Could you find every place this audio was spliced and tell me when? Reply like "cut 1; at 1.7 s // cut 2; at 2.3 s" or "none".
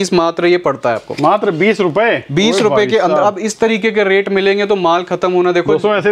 none

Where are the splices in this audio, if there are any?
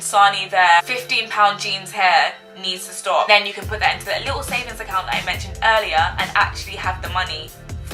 cut 1; at 0.8 s // cut 2; at 3.3 s

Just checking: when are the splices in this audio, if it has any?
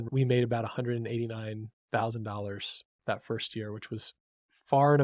none

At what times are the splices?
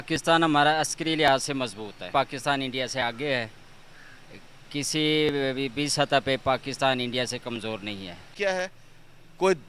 cut 1; at 2.1 s // cut 2; at 8.3 s

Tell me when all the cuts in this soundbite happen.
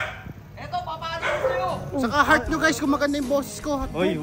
cut 1; at 1.8 s

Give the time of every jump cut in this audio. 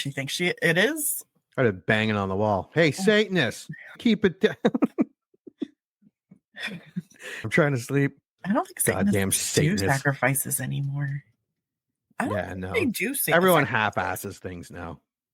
cut 1; at 4.0 s // cut 2; at 7.5 s // cut 3; at 12.0 s

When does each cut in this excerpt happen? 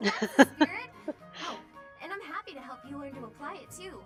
none

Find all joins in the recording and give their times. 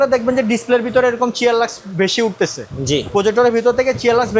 none

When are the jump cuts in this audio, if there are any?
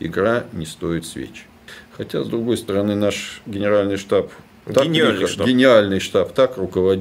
none

